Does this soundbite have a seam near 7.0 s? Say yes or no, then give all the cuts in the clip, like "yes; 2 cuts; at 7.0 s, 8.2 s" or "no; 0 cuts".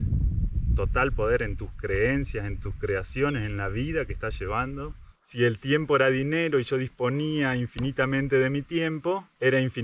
no; 1 cut; at 5.2 s